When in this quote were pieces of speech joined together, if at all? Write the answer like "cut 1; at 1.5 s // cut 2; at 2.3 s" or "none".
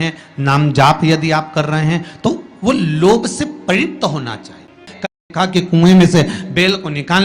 cut 1; at 5.2 s